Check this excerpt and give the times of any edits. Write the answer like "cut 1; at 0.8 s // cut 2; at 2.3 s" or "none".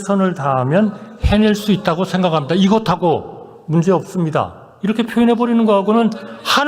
none